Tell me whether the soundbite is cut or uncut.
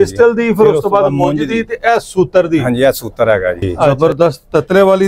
cut